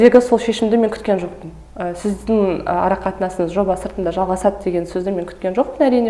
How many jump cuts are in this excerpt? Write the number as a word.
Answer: zero